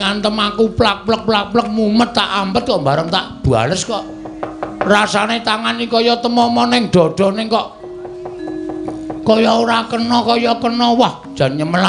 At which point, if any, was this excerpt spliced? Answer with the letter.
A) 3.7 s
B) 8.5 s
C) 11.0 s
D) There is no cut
D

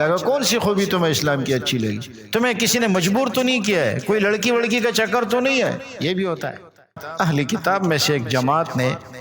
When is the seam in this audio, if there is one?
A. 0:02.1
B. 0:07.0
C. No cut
B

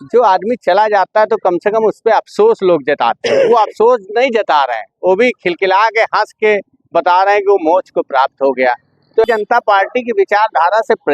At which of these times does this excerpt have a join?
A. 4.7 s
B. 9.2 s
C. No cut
B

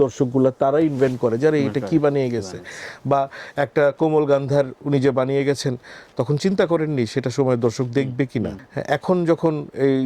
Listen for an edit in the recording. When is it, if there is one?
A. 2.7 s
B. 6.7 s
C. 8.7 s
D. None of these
C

